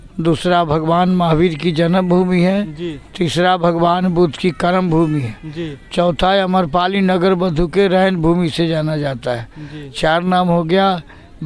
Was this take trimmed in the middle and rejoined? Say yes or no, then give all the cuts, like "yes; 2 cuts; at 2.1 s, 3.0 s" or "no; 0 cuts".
no; 0 cuts